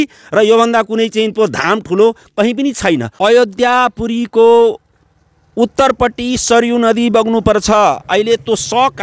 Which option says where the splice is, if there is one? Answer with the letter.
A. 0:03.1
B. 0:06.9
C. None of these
A